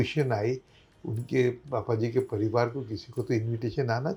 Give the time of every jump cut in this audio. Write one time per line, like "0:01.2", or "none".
none